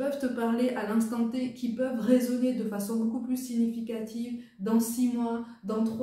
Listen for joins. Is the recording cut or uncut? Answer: uncut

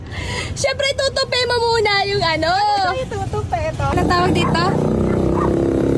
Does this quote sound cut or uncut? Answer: cut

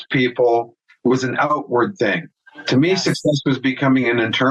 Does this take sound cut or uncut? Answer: uncut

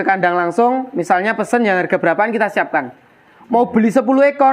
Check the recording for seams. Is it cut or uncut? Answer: uncut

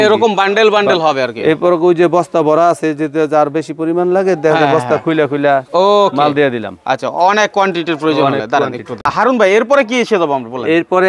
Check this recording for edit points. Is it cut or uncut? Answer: uncut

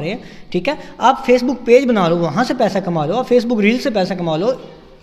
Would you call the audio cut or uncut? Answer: uncut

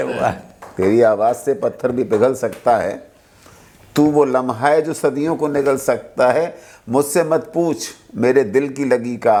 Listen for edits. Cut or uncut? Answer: uncut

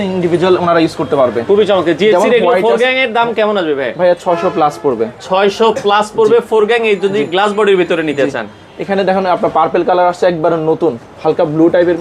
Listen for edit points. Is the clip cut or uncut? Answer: uncut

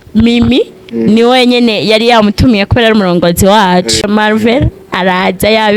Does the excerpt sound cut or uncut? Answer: cut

